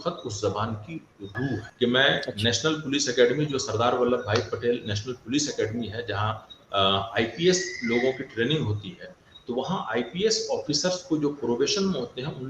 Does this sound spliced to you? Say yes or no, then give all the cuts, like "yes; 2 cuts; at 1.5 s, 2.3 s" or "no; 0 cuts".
yes; 1 cut; at 1.6 s